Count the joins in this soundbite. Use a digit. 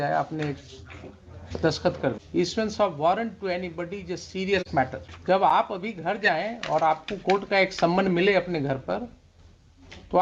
2